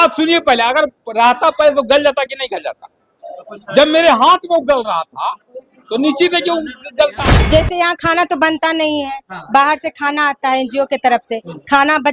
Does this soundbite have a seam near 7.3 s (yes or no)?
yes